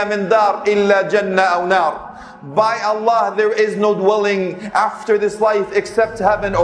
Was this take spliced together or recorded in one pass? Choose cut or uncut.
uncut